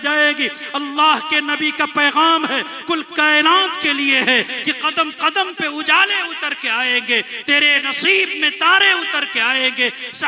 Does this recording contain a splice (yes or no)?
no